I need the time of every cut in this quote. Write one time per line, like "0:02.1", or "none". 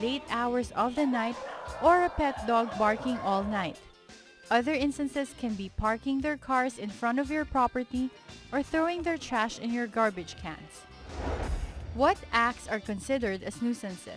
0:02.1